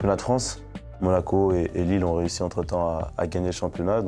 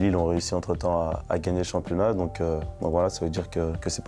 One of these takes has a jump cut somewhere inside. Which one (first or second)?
first